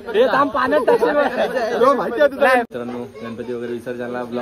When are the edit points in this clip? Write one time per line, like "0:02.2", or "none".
0:02.7